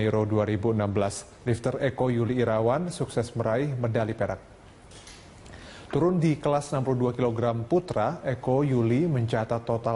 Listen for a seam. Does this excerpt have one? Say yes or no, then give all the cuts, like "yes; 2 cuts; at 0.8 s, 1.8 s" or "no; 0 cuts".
no; 0 cuts